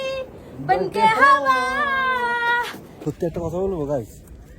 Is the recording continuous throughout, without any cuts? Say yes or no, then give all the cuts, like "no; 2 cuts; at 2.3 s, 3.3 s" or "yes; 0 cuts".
no; 1 cut; at 3.0 s